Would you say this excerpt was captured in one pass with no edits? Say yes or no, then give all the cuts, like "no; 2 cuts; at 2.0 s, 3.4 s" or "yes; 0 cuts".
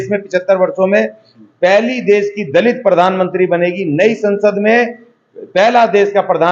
yes; 0 cuts